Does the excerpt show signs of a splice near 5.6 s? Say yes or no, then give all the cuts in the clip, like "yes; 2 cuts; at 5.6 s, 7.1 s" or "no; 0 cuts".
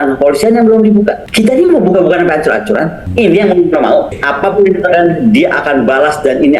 no; 3 cuts; at 1.2 s, 3.1 s, 4.2 s